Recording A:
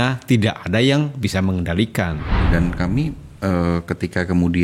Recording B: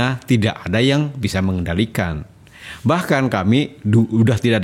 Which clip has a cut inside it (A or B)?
A